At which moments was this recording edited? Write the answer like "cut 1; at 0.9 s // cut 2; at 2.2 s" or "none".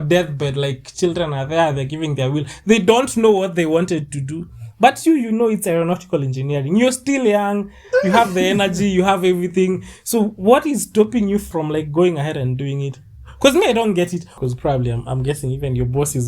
cut 1; at 11.5 s // cut 2; at 14.2 s